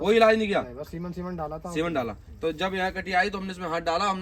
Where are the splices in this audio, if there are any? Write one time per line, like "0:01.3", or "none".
none